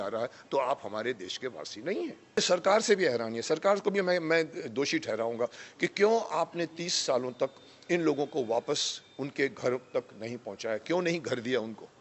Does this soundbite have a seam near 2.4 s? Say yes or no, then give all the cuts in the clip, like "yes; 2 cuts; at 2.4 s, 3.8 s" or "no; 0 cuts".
yes; 1 cut; at 2.4 s